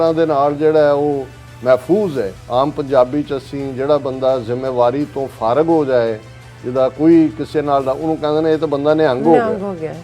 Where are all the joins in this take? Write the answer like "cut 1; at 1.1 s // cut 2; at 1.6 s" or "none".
cut 1; at 2.4 s